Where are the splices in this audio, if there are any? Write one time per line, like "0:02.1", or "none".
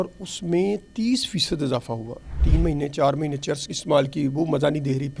0:02.4